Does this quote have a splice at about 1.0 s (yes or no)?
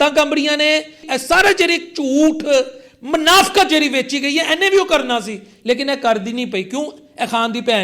yes